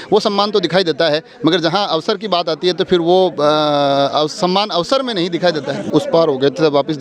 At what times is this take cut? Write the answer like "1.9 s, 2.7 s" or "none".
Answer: 5.8 s